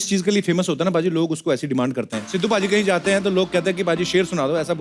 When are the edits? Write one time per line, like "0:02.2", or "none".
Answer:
0:02.2